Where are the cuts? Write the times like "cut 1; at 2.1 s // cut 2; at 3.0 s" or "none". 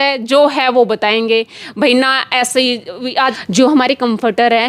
cut 1; at 3.4 s

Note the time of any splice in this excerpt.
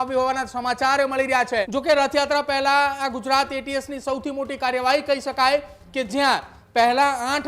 cut 1; at 1.7 s

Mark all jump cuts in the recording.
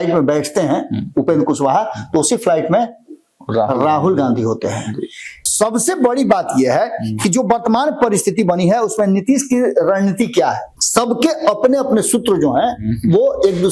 cut 1; at 5.4 s // cut 2; at 10.7 s

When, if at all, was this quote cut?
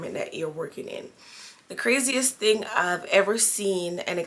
none

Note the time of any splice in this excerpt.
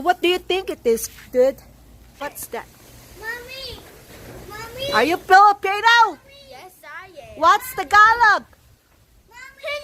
cut 1; at 2.1 s

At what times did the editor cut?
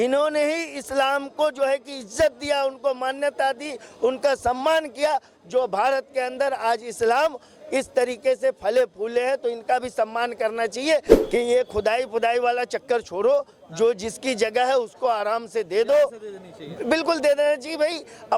cut 1; at 11.2 s

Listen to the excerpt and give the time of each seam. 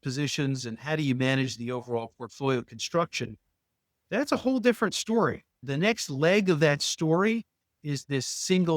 cut 1; at 5.6 s

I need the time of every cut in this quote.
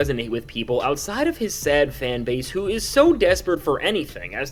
none

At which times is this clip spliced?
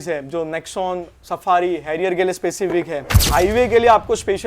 cut 1; at 3.2 s

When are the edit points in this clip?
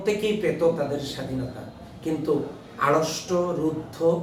none

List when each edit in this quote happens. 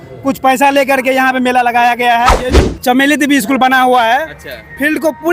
cut 1; at 2.7 s

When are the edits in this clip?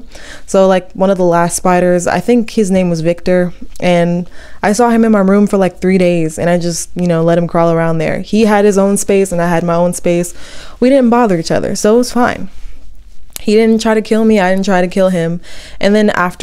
none

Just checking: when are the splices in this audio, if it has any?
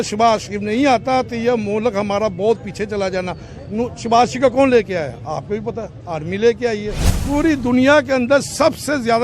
cut 1; at 7.1 s

